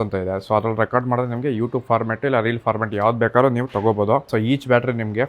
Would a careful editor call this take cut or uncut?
cut